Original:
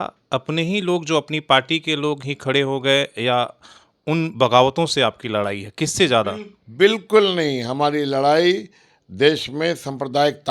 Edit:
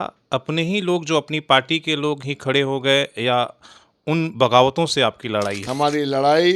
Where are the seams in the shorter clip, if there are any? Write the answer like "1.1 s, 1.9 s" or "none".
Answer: 5.7 s